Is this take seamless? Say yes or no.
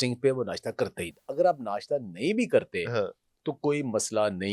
no